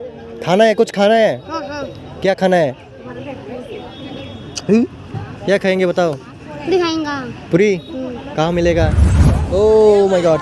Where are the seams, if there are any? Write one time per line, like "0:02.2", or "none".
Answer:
0:09.3